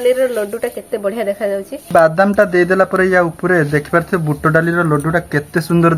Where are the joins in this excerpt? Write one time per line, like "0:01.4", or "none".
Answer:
0:01.8